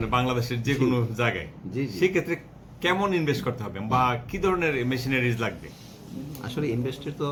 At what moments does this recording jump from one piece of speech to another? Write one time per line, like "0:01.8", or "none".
none